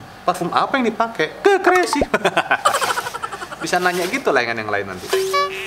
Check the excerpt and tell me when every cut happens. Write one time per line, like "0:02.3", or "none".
none